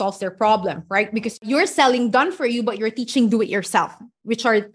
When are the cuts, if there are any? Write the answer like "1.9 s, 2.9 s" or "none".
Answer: 1.4 s